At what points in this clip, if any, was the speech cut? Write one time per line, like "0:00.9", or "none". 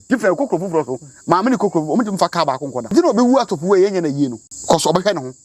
0:02.9
0:04.5